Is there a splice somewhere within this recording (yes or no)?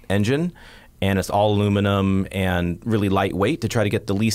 no